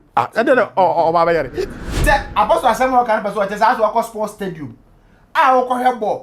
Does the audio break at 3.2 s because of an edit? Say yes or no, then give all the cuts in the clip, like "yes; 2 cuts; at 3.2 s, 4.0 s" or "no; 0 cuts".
no; 1 cut; at 2.0 s